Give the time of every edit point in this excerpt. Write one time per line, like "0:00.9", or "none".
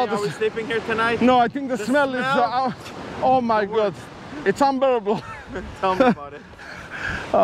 none